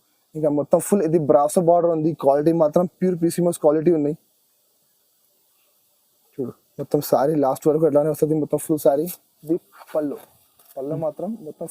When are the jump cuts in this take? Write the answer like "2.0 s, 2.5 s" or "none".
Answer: 9.3 s